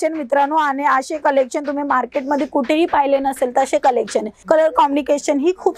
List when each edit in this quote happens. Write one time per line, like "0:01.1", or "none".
0:04.3